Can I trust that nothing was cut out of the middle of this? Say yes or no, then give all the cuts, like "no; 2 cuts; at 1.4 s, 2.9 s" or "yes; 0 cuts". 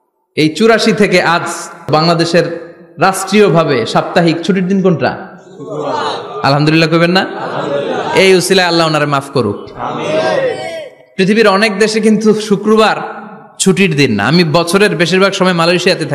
no; 1 cut; at 1.9 s